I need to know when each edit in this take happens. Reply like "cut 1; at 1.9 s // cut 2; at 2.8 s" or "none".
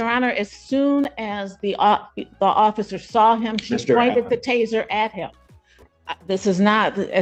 none

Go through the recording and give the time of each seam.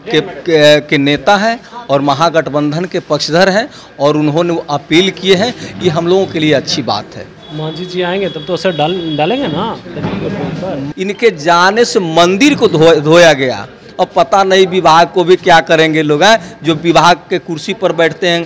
cut 1; at 10.8 s

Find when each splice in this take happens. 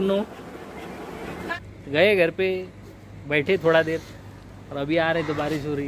cut 1; at 1.5 s

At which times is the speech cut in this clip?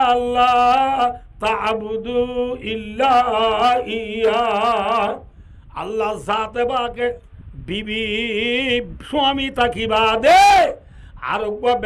cut 1; at 7.2 s

